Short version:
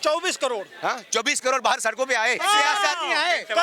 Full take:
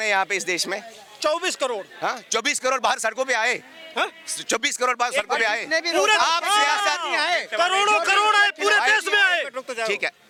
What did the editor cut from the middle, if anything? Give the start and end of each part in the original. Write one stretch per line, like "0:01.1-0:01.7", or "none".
0:03.6-0:06.4